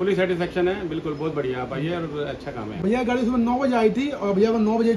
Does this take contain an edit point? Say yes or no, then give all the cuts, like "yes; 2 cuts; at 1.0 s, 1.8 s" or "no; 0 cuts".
no; 0 cuts